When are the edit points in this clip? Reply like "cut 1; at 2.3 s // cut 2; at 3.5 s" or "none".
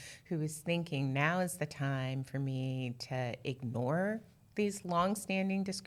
none